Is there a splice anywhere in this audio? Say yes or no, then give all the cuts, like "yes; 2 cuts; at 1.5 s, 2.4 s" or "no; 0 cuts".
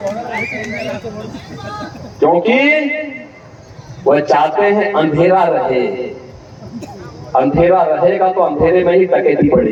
no; 0 cuts